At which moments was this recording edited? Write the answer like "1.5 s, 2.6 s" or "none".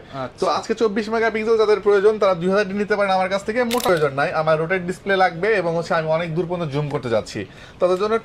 3.9 s